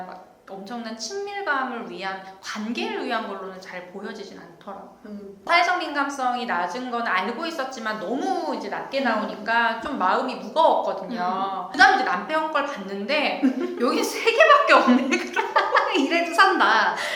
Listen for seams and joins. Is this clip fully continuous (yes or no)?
no